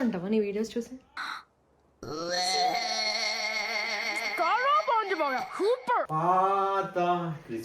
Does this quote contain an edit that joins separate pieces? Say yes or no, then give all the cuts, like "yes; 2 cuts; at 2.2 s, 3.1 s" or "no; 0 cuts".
yes; 1 cut; at 6.1 s